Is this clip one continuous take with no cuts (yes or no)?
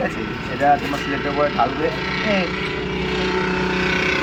yes